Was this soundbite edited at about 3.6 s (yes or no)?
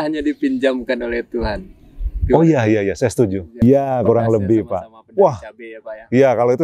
yes